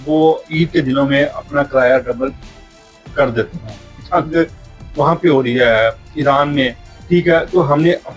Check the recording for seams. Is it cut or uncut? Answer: cut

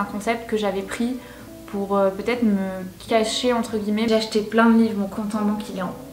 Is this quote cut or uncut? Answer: cut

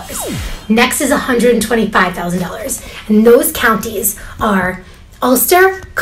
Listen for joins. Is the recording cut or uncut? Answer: uncut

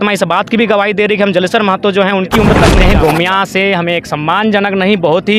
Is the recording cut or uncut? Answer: cut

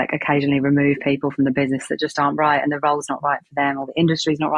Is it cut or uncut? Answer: uncut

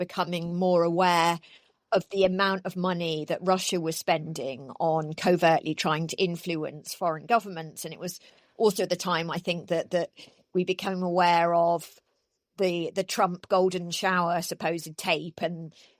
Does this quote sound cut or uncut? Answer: uncut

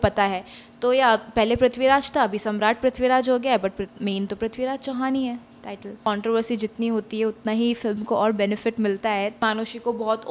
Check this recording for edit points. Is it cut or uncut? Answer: cut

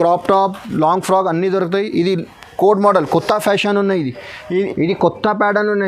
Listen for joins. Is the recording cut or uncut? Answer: cut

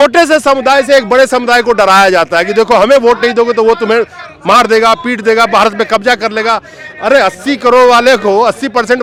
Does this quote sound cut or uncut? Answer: uncut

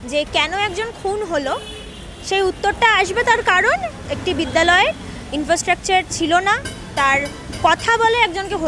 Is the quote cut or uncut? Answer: cut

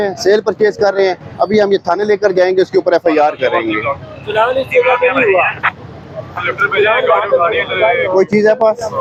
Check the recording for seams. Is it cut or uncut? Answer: uncut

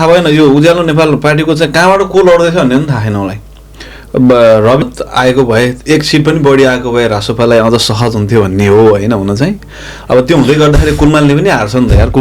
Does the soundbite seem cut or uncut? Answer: cut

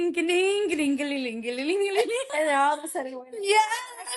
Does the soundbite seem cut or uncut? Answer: cut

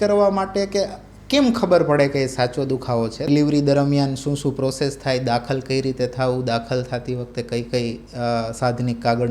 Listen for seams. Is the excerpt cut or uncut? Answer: cut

